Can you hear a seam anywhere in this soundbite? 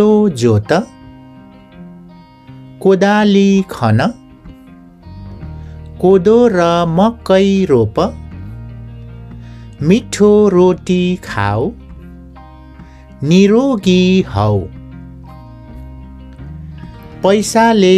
yes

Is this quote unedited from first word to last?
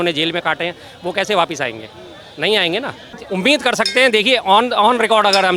no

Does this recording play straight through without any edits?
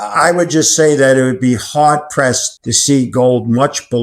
yes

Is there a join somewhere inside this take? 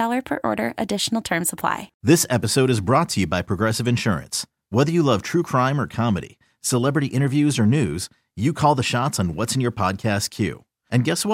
yes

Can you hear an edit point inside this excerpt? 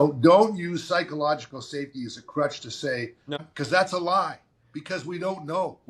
yes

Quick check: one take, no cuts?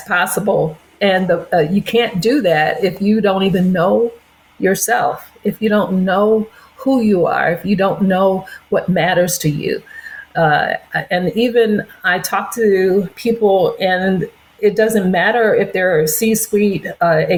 yes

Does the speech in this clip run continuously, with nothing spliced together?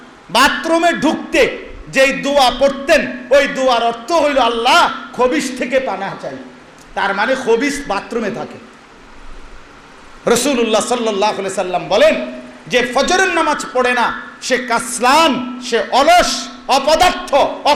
yes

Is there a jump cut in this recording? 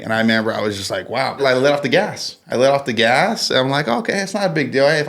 yes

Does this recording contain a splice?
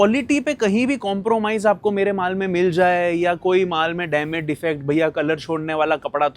no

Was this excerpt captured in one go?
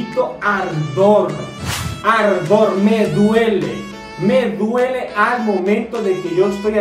yes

